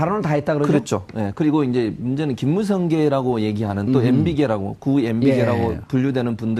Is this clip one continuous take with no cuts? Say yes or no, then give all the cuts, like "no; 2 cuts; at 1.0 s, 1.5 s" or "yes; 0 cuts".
yes; 0 cuts